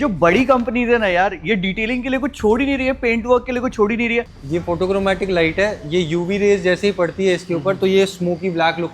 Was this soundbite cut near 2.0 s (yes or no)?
no